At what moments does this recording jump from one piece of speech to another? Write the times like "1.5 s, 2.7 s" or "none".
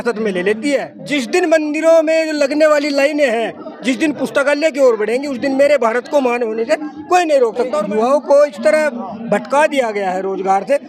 1.0 s, 7.8 s